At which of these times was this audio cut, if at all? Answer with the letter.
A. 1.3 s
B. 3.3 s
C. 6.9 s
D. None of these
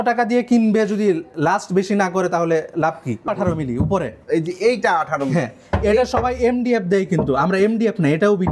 B